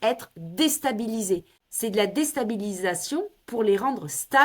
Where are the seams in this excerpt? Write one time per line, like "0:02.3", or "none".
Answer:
0:01.6

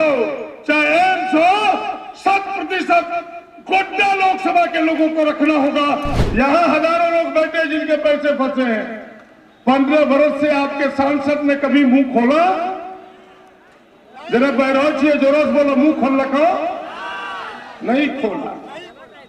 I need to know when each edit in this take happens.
0:06.1

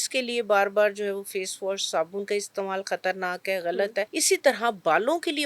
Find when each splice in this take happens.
0:04.2

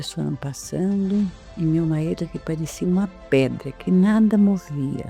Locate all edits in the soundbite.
none

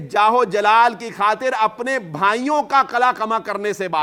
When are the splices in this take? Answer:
none

